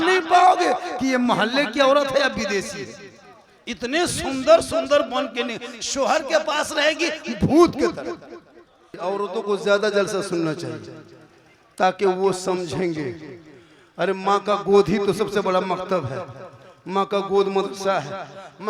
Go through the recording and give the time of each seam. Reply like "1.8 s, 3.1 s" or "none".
9.0 s